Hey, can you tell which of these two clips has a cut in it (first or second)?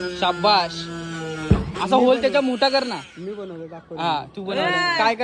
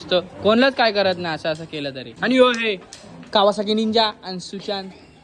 second